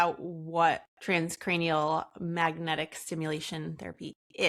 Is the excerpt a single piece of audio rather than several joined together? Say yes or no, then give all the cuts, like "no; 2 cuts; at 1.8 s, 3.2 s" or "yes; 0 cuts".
no; 1 cut; at 0.9 s